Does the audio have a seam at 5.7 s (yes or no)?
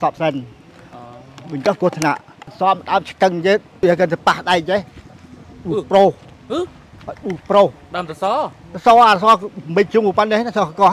no